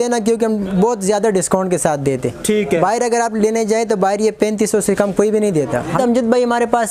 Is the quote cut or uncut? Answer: cut